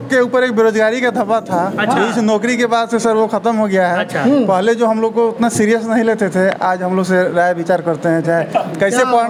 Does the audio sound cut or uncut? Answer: uncut